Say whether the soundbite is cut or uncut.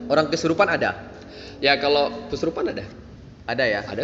uncut